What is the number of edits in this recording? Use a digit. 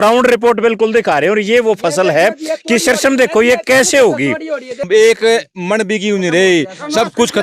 1